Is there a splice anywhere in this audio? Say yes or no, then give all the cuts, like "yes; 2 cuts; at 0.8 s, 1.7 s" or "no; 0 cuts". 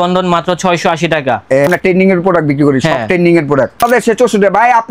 yes; 2 cuts; at 1.7 s, 3.8 s